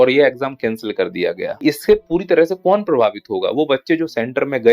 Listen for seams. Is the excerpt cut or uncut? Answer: cut